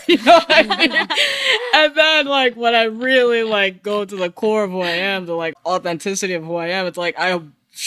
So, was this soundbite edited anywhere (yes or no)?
yes